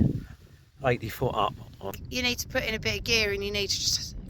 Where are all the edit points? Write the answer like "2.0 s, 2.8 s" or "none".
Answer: 1.9 s